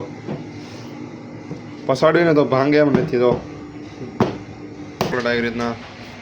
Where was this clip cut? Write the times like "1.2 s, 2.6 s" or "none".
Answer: 5.1 s